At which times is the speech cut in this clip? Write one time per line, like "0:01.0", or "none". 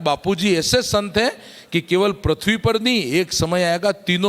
none